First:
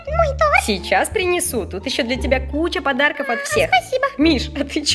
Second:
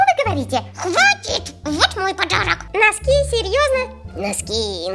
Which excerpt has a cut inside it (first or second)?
second